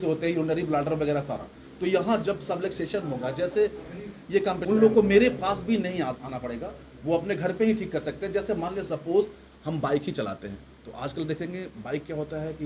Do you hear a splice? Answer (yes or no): yes